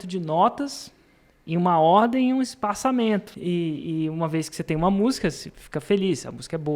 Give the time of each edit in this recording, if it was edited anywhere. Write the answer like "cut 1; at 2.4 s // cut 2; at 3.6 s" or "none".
cut 1; at 3.3 s